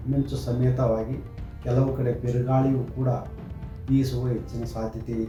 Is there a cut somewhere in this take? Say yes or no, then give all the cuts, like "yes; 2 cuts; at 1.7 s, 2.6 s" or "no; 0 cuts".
no; 0 cuts